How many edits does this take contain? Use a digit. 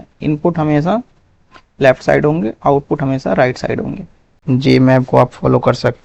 1